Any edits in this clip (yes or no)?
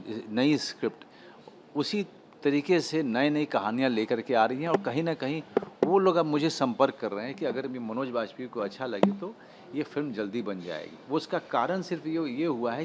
no